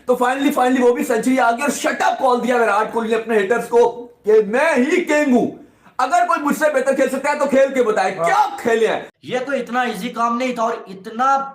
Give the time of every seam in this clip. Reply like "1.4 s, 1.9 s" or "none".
9.1 s